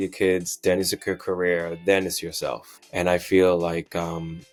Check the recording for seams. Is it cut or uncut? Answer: uncut